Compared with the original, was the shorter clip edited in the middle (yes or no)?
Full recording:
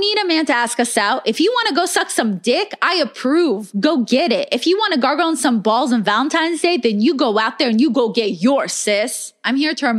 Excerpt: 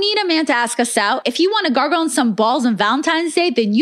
yes